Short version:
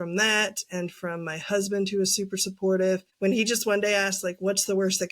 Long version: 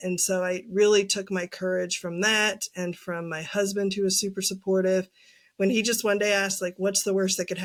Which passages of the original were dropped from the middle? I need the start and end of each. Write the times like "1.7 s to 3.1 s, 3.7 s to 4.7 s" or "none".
5.1 s to 5.5 s